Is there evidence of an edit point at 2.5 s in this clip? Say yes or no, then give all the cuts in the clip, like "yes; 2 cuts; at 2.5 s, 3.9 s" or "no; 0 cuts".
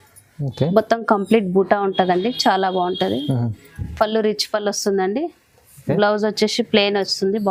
no; 0 cuts